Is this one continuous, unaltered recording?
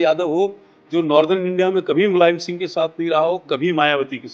yes; 0 cuts

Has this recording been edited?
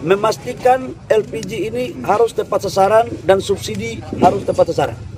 no; 0 cuts

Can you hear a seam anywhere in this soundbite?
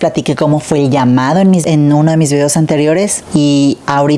yes; 1 cut; at 1.6 s

